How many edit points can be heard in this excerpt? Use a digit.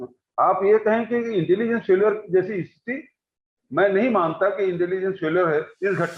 0